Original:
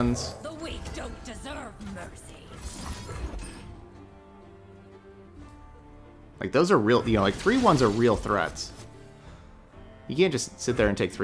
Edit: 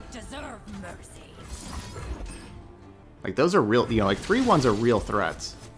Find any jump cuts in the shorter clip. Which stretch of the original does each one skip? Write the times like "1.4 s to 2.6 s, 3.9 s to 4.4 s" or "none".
4.2 s to 6.2 s

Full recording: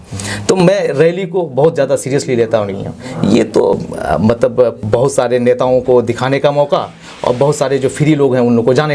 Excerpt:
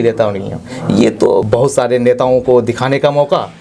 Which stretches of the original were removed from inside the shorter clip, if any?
3.8 s to 4.8 s

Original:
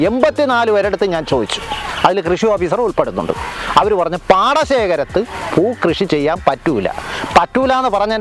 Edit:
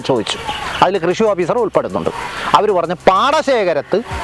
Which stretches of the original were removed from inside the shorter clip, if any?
none

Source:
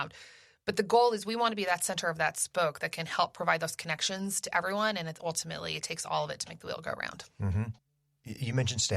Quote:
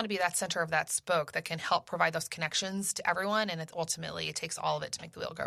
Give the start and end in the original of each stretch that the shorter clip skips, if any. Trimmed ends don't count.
none

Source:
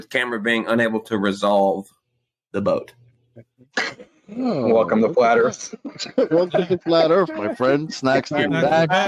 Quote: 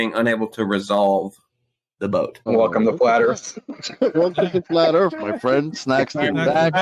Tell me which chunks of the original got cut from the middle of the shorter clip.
3.0 s to 4.6 s

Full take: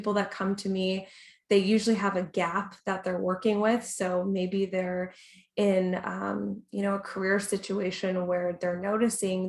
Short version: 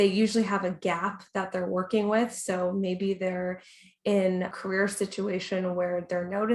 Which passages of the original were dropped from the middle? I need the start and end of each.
6.1 s to 7.1 s

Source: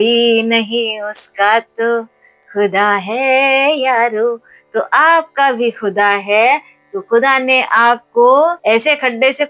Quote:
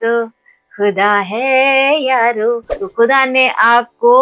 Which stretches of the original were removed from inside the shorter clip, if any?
4.5 s to 6.9 s

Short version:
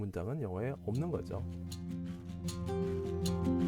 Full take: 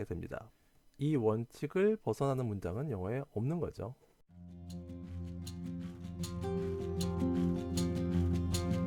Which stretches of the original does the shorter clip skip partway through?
3.9 s to 5.2 s

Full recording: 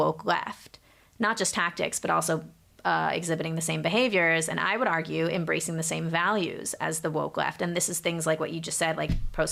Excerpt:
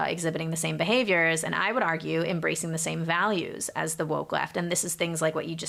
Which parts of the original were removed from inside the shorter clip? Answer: none

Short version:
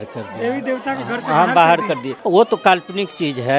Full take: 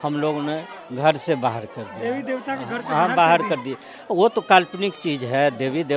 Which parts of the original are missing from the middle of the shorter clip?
3.7 s to 3.9 s

